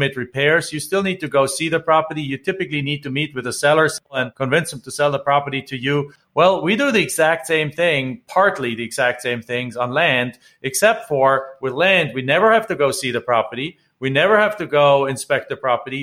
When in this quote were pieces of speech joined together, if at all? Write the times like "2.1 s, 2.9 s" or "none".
4.1 s, 6.2 s

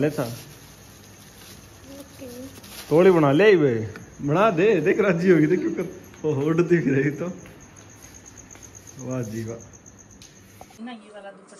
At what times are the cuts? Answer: 10.7 s

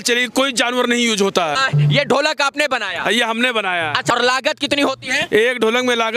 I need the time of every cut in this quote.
1.6 s, 4.1 s

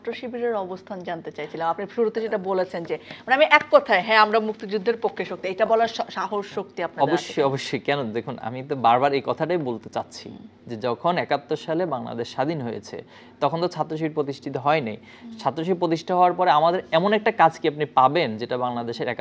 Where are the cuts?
none

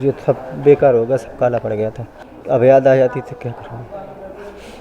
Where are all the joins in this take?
2.1 s

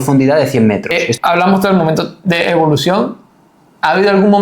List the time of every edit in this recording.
1.0 s

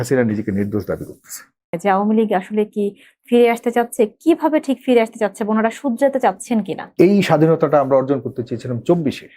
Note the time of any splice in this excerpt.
1.8 s, 6.8 s

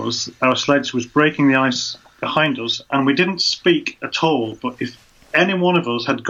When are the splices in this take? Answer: none

